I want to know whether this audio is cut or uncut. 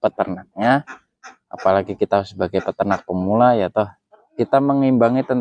uncut